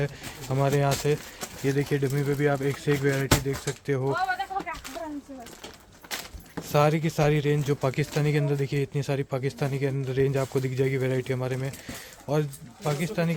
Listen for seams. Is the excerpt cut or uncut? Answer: uncut